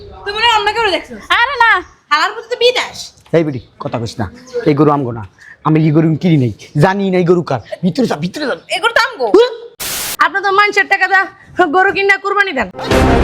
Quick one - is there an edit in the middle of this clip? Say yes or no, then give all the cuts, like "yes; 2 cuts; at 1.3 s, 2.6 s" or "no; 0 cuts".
yes; 1 cut; at 10.0 s